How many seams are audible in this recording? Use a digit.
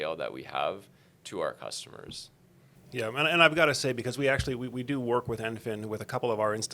1